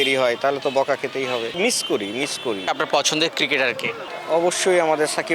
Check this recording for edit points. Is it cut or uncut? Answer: cut